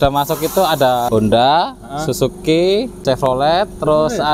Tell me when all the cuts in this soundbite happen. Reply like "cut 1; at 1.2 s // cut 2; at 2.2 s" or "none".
cut 1; at 1.1 s // cut 2; at 2.9 s